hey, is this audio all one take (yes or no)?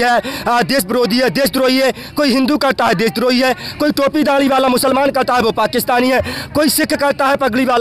yes